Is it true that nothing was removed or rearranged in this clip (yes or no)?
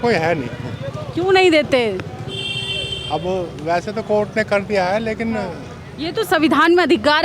yes